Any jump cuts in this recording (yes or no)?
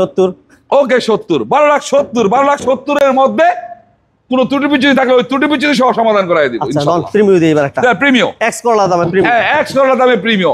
no